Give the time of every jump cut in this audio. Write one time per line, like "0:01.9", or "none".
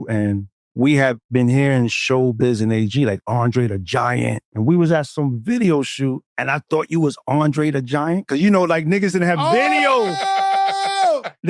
0:04.5
0:05.1
0:06.3

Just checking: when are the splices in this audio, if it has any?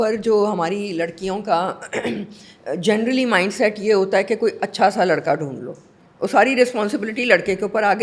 none

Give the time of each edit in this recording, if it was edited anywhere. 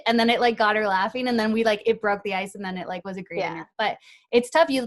0:03.7

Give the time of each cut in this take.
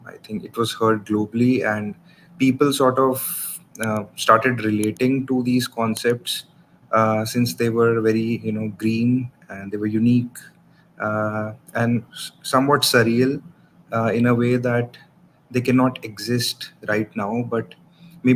none

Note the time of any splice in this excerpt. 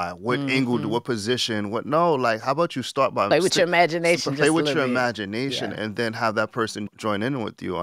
0:06.9

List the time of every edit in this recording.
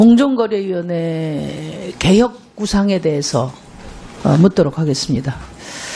none

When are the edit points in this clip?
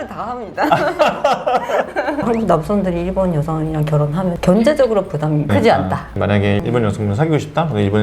0:02.2
0:06.0

